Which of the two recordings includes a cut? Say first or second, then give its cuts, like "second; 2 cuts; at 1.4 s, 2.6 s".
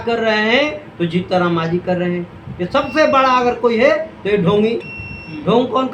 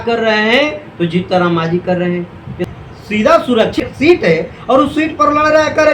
second; 2 cuts; at 2.5 s, 3.8 s